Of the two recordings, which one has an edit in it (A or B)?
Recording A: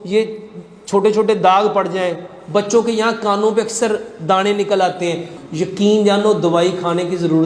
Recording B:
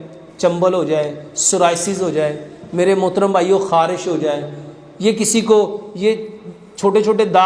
A